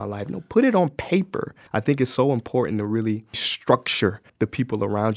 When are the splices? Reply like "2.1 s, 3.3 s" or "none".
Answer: 1.6 s, 3.5 s, 4.2 s